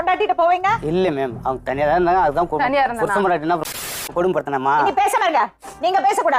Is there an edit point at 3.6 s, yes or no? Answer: yes